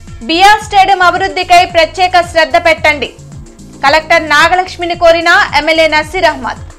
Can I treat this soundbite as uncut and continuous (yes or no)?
yes